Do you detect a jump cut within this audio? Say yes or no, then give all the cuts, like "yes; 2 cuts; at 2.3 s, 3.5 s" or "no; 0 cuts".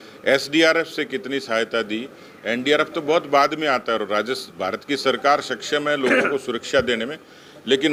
no; 0 cuts